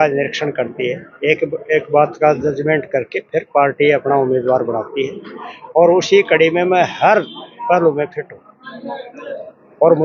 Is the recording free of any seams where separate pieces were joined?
yes; 0 cuts

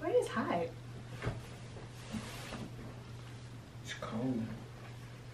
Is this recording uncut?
yes; 0 cuts

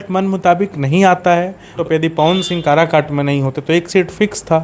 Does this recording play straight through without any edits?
no; 1 cut; at 1.8 s

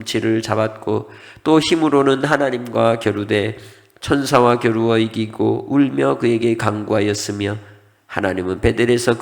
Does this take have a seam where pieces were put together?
no; 0 cuts

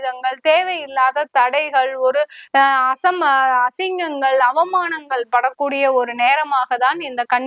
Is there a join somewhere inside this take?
no; 0 cuts

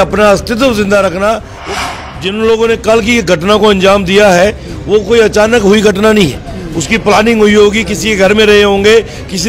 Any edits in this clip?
yes; 1 cut; at 1.5 s

